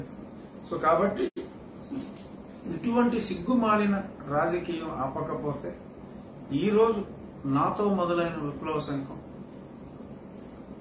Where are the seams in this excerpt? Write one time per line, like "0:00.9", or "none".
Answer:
0:01.3